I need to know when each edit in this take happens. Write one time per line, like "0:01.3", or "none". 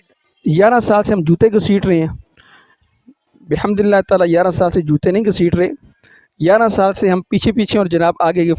none